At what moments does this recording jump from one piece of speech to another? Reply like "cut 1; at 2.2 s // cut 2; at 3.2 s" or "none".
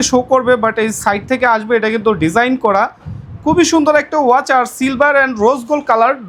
none